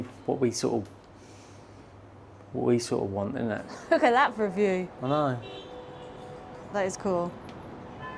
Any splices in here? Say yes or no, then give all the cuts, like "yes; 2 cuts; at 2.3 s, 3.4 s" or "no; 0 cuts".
yes; 1 cut; at 3.7 s